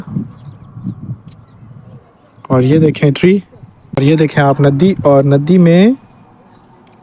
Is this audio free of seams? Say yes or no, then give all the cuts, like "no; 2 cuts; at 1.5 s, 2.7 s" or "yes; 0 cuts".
yes; 0 cuts